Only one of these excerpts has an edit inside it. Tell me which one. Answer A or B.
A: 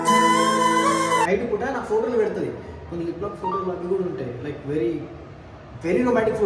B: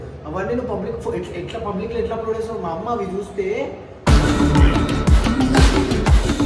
A